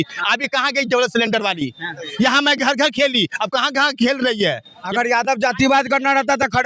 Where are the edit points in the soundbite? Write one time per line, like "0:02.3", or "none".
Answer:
0:02.0
0:04.9